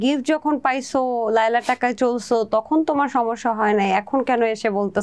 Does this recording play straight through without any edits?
yes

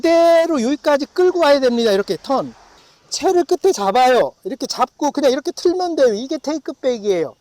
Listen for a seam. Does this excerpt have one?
yes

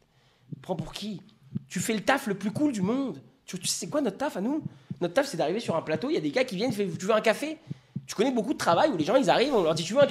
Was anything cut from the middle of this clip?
no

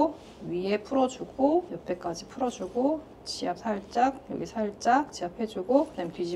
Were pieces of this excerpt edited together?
yes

